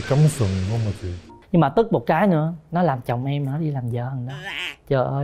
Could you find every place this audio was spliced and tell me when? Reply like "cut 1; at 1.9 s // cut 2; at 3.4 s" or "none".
cut 1; at 1.3 s